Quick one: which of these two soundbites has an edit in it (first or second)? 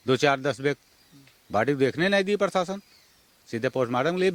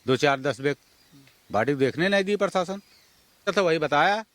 second